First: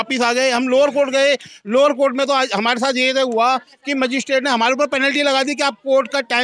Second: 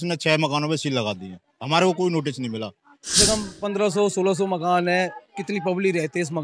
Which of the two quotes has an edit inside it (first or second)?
second